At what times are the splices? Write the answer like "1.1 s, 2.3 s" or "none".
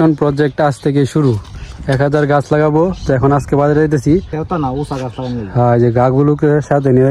4.3 s